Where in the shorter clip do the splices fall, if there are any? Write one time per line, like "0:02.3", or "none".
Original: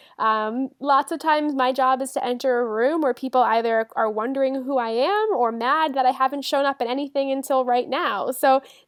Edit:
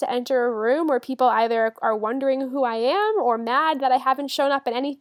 none